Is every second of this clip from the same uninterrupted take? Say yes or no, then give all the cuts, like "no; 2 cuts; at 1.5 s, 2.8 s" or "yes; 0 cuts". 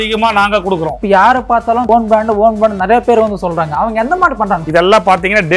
no; 3 cuts; at 1.0 s, 1.9 s, 4.6 s